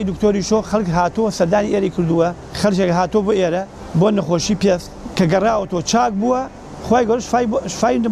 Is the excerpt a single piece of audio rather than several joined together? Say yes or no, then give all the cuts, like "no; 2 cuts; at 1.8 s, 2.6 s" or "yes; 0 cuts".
no; 3 cuts; at 2.4 s, 3.8 s, 5.0 s